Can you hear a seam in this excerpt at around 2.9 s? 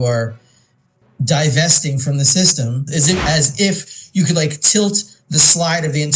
yes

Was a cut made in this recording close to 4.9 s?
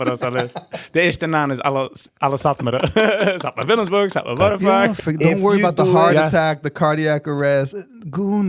yes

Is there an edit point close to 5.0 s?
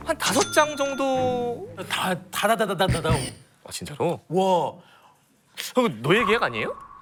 no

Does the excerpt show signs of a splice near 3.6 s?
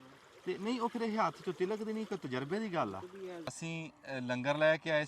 yes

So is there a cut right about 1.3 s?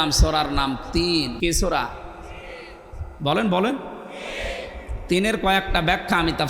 yes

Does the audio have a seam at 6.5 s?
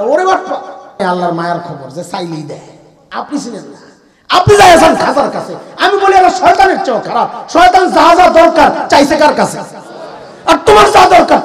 no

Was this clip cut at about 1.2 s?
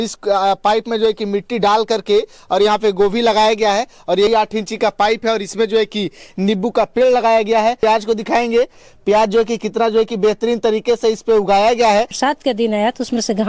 no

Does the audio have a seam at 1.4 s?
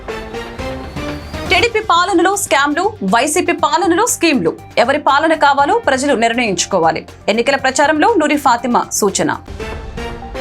yes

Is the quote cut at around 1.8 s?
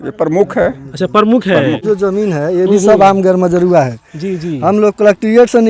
yes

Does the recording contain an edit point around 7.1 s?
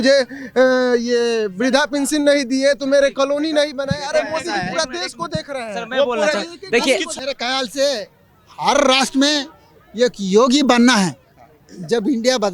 yes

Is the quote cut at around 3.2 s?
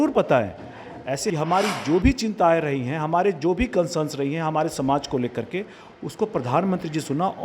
no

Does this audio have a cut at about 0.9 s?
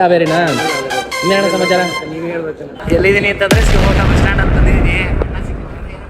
no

